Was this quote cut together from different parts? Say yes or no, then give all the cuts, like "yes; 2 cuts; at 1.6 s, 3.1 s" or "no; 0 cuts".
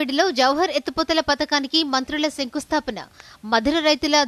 no; 0 cuts